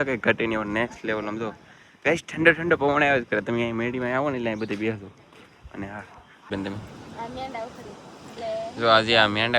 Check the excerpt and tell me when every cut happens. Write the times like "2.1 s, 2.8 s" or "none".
6.5 s

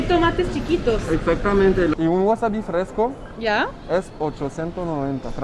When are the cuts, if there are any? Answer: 1.9 s

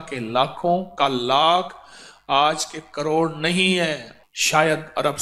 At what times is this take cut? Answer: 4.1 s

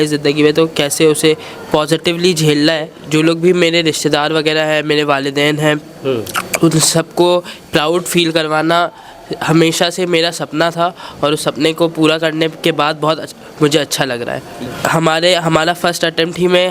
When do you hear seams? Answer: 3.0 s, 14.5 s

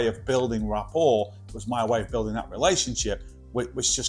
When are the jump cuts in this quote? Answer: none

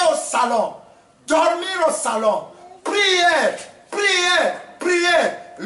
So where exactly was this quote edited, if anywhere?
none

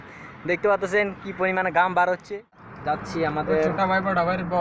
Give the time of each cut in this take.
2.7 s

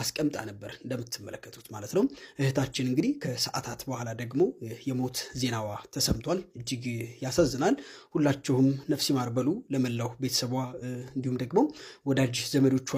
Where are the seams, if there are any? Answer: none

